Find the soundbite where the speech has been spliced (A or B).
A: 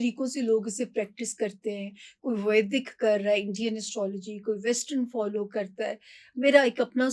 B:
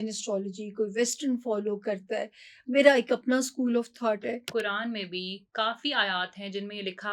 B